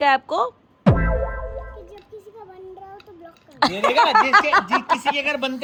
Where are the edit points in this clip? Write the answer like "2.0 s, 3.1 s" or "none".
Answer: none